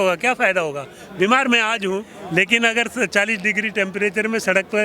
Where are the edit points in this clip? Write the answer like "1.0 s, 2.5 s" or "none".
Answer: 2.1 s